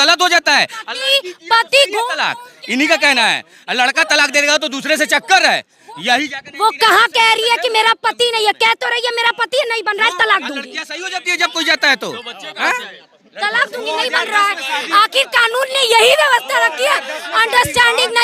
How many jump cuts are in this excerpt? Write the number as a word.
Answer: zero